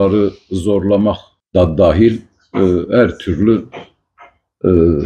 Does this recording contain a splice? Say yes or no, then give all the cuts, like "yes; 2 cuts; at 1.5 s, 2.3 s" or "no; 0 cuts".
yes; 1 cut; at 1.3 s